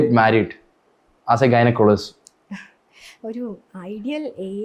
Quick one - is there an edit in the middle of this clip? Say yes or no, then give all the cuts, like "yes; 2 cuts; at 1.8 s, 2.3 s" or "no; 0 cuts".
no; 0 cuts